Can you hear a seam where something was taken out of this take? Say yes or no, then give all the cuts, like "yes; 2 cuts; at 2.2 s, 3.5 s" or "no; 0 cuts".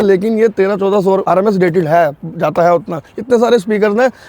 yes; 1 cut; at 1.2 s